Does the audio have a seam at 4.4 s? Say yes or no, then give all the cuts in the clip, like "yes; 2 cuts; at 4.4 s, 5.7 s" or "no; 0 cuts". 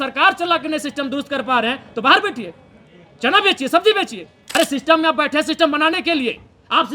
yes; 1 cut; at 4.4 s